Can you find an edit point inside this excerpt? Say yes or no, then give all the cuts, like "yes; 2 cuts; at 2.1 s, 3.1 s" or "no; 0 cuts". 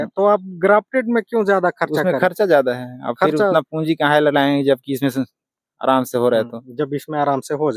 no; 0 cuts